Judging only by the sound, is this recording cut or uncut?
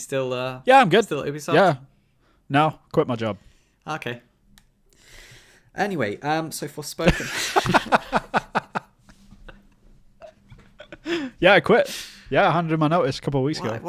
uncut